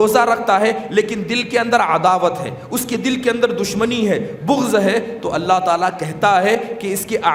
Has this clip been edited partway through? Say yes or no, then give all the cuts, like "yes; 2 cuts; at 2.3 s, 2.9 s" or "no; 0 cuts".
no; 0 cuts